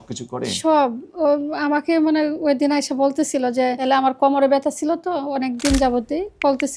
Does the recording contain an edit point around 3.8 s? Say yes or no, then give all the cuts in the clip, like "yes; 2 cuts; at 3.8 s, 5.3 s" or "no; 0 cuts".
yes; 1 cut; at 3.8 s